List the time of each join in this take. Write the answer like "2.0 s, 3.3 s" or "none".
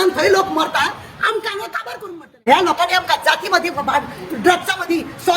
2.3 s